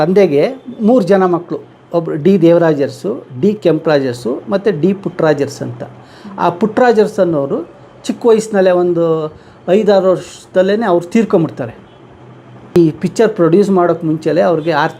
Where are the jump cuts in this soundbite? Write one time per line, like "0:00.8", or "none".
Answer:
0:12.8